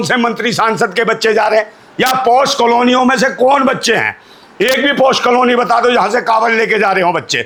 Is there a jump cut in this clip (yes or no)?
no